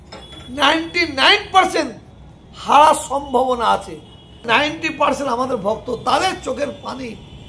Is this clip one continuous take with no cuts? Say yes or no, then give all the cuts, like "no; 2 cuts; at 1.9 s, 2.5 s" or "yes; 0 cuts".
no; 1 cut; at 4.4 s